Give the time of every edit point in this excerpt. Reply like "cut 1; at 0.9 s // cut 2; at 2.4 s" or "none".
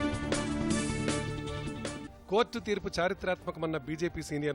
cut 1; at 2.1 s